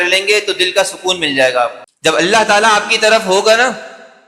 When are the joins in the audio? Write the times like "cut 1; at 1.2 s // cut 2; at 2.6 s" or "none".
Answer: cut 1; at 1.9 s